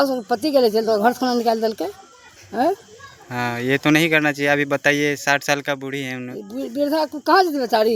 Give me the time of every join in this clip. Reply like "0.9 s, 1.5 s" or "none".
none